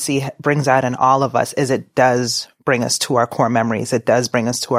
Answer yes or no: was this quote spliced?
no